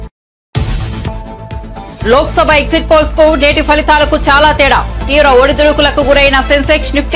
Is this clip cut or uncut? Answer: cut